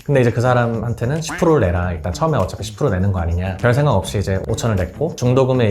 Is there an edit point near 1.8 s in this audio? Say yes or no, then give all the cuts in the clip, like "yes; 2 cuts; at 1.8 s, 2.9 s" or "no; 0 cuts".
no; 2 cuts; at 3.6 s, 4.4 s